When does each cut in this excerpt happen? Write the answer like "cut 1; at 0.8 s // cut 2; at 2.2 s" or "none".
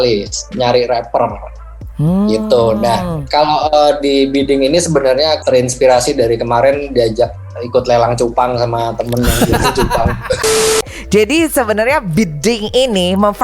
cut 1; at 5.4 s // cut 2; at 10.8 s